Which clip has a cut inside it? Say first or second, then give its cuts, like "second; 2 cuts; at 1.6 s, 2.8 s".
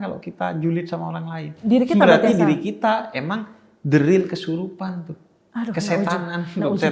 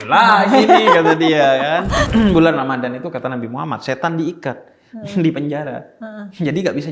second; 1 cut; at 2.1 s